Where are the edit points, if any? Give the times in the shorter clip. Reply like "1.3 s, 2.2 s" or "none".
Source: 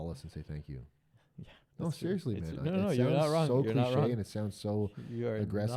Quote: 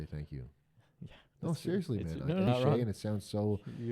2.5 s

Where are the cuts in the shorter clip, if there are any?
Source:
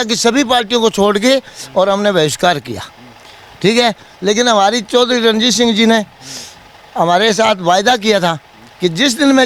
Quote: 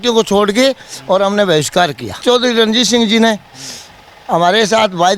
2.2 s

